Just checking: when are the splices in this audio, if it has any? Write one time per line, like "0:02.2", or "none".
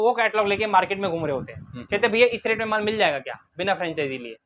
none